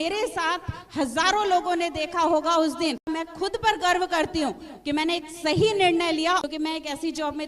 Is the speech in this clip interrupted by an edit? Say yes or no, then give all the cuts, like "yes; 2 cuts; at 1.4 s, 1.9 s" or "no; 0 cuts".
yes; 2 cuts; at 3.0 s, 6.4 s